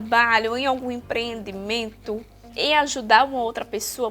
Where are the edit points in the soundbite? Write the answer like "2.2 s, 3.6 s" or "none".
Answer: 2.4 s